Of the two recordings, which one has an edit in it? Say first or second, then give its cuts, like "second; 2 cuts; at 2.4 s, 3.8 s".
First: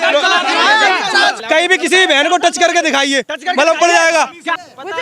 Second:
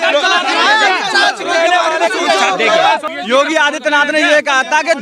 first; 1 cut; at 1.4 s